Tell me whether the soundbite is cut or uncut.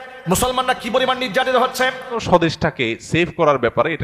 cut